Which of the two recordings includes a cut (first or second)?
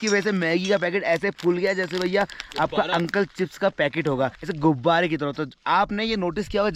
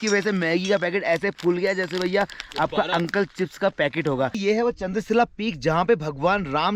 second